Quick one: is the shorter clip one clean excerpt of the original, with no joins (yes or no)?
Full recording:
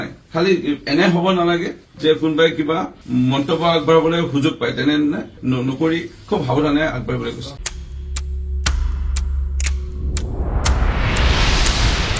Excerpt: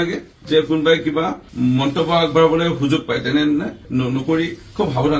yes